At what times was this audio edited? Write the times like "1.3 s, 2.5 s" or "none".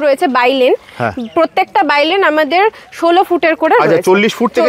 none